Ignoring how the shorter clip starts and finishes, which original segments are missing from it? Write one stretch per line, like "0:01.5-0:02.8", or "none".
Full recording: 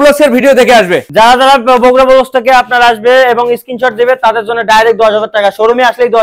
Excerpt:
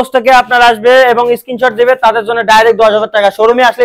none